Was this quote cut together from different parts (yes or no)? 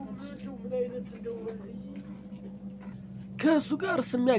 yes